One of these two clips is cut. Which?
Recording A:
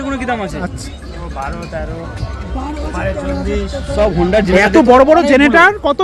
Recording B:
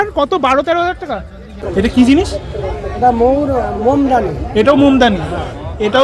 B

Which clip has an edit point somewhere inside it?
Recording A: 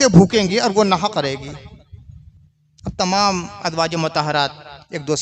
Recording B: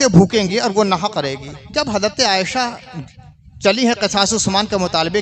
B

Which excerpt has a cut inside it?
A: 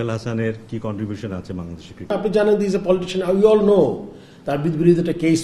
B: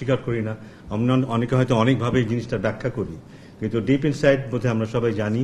A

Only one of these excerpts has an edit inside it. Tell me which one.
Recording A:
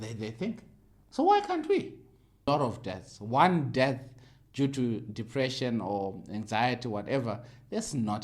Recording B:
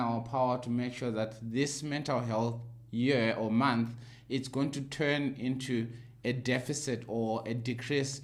A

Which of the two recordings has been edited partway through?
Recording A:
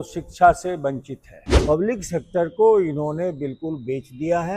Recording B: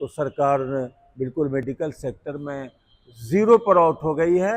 A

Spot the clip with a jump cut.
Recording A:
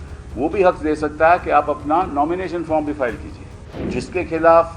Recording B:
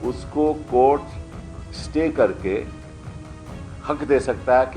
A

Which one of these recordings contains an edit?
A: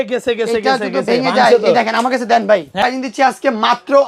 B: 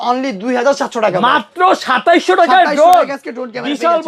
A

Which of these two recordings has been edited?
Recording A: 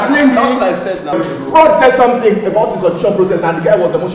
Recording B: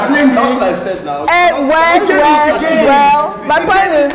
A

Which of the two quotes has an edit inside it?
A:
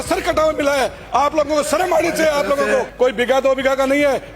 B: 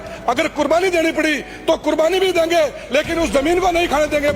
A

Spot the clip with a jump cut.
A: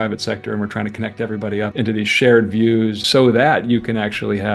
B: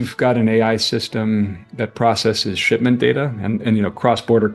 A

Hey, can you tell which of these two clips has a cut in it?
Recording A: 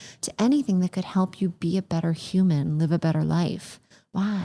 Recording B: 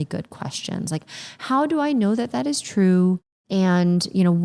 B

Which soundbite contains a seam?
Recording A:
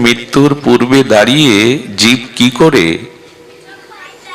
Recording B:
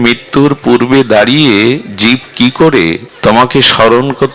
B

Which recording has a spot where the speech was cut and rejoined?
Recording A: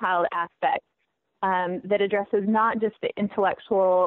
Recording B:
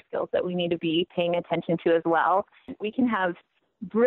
B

